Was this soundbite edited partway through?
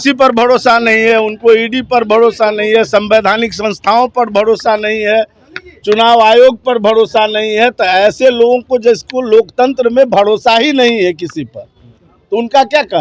no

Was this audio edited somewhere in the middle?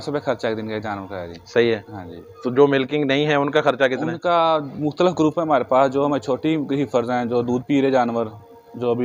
no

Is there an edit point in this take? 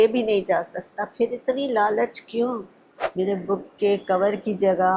yes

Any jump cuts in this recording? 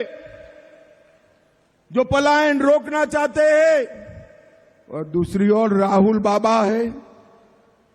yes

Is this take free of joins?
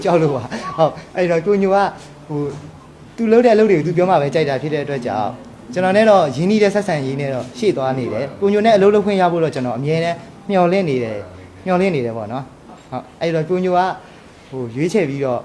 yes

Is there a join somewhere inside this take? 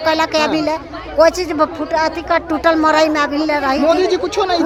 no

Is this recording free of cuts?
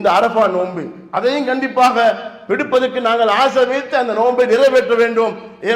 yes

